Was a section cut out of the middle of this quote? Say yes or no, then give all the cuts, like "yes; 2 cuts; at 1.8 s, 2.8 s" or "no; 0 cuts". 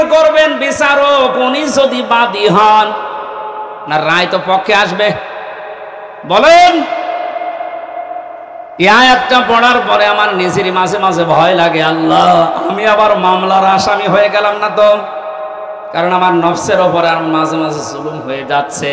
no; 0 cuts